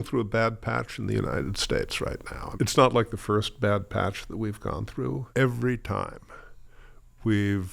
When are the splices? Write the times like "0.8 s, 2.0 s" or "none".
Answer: 2.4 s, 5.2 s